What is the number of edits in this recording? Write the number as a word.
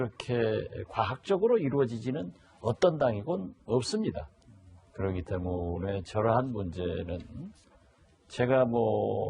one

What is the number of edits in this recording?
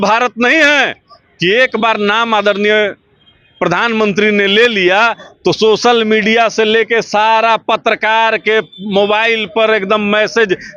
zero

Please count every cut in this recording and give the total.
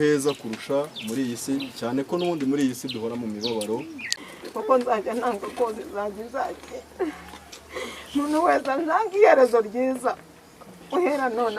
one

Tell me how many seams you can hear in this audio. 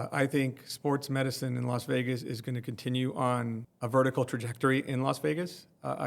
one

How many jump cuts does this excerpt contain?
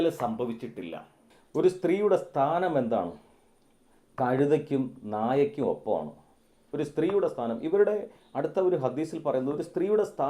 one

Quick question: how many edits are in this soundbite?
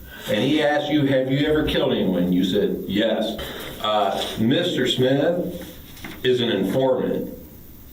one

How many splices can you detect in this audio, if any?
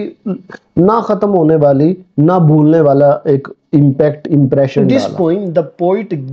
one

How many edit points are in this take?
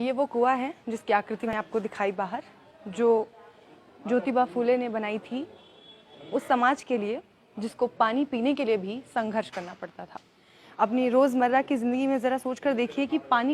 one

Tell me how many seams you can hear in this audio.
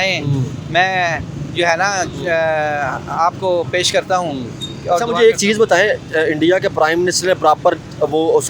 zero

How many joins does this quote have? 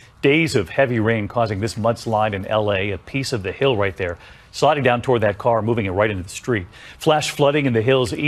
zero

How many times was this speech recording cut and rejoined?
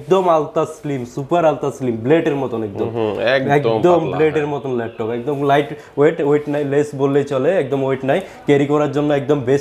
zero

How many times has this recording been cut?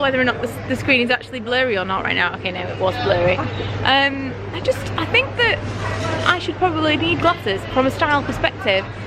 zero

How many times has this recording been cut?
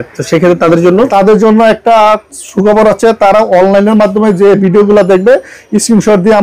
one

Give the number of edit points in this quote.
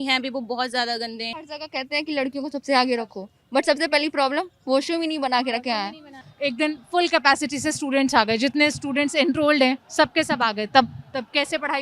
two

